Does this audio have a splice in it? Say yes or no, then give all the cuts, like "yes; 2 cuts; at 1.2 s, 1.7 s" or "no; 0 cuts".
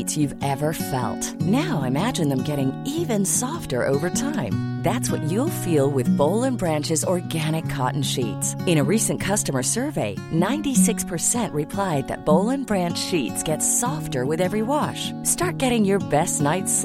no; 0 cuts